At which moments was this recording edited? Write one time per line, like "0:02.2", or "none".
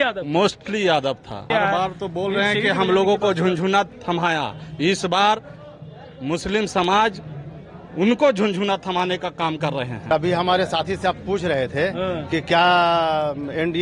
0:01.4
0:10.1